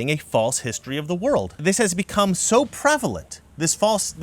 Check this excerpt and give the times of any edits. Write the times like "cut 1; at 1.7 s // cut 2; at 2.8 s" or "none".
cut 1; at 1.6 s